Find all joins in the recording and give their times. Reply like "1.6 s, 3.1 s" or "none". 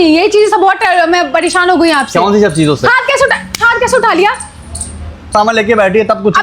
5.3 s